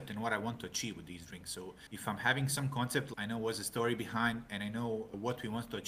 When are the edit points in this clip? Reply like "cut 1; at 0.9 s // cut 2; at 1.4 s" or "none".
cut 1; at 3.1 s